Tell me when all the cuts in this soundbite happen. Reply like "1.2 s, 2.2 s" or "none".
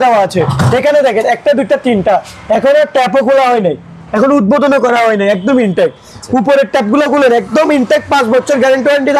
none